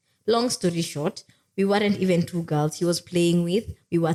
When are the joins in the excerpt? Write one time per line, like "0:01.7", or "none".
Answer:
none